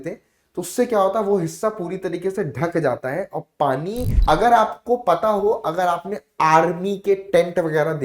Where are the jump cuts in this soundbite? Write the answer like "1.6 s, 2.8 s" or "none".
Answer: 4.1 s